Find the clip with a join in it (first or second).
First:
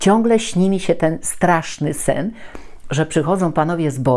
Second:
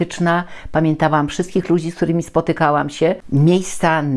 second